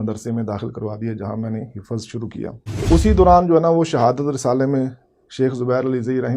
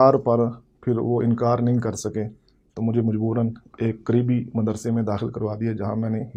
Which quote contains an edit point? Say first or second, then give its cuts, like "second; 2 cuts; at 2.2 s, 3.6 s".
first; 1 cut; at 2.8 s